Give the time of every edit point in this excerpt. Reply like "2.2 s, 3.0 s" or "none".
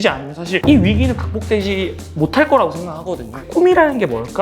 3.3 s